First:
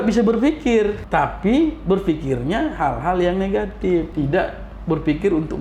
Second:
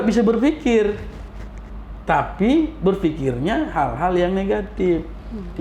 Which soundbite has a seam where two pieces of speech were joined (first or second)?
first